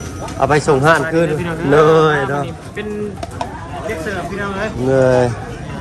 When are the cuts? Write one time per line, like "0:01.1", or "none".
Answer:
none

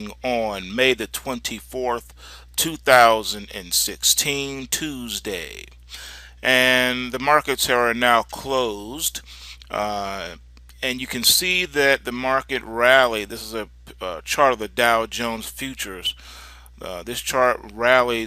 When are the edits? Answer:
0:12.9

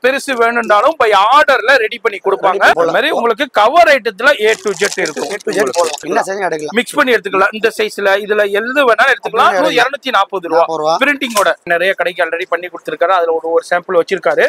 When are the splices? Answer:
0:02.8
0:06.0
0:11.6

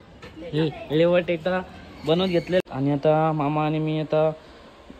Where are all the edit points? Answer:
0:02.6

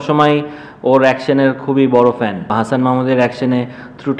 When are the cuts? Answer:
0:02.5

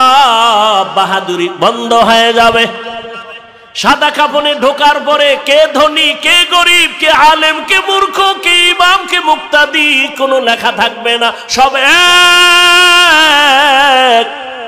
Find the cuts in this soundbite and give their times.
none

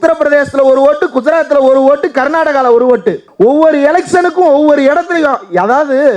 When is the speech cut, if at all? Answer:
none

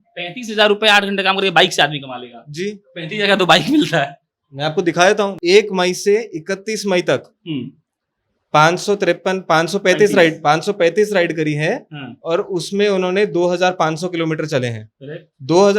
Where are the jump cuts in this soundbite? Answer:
0:05.3

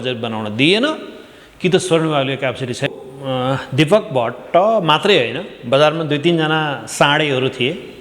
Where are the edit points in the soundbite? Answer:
0:02.8

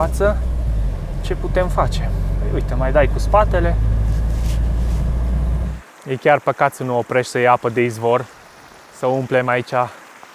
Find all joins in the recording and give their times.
0:05.7

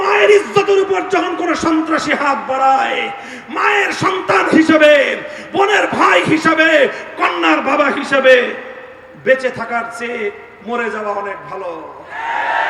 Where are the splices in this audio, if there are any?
none

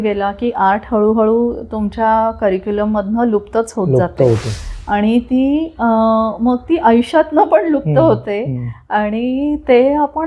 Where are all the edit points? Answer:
none

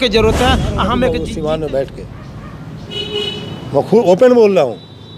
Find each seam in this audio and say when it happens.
0:01.2

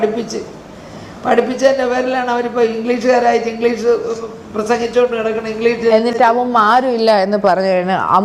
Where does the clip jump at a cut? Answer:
none

